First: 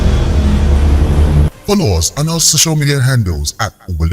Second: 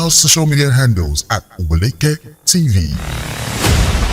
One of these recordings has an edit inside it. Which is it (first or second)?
first